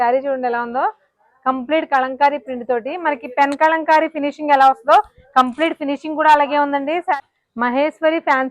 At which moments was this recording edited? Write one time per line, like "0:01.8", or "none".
0:07.1